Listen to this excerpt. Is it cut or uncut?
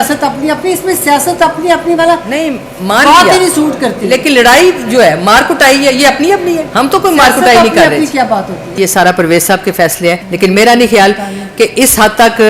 cut